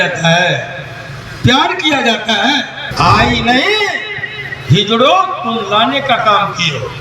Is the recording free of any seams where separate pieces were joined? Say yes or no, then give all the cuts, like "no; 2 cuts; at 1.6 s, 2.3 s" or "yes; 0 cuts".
no; 1 cut; at 2.8 s